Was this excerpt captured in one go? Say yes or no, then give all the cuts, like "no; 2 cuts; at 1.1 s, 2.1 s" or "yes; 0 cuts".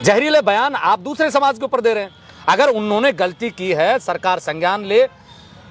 yes; 0 cuts